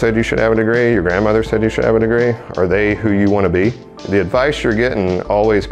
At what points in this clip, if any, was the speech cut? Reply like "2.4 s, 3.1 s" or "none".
3.9 s

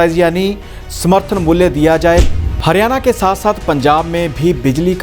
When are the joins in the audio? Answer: 2.3 s

